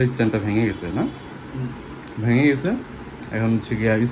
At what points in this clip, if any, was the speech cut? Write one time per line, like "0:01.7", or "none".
none